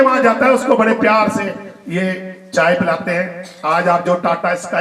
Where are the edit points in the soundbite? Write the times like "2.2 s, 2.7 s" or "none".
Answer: none